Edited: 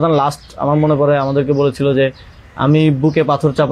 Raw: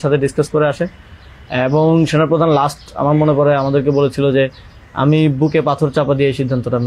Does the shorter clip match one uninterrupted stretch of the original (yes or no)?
yes